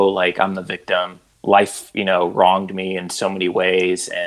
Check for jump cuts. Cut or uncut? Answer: cut